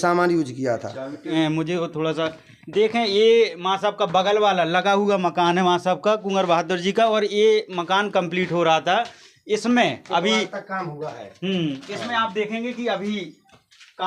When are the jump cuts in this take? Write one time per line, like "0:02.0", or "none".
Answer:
0:01.3

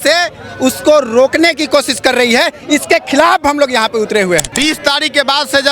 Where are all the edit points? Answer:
0:04.5

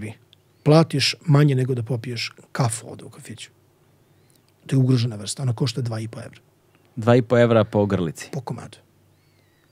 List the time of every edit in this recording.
none

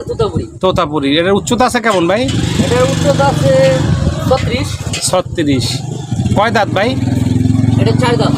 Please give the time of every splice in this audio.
none

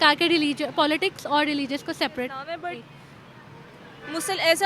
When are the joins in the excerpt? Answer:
0:02.5

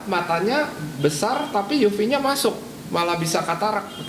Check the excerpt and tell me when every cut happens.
none

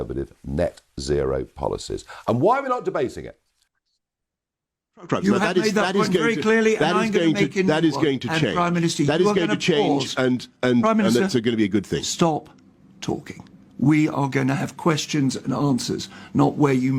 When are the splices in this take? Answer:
none

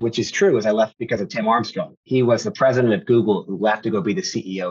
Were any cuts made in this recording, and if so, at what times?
0:02.0

